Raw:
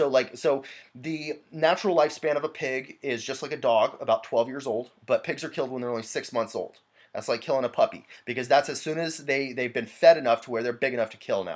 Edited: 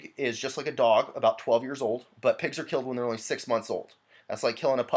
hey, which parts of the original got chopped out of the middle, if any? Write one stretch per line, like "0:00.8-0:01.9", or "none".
none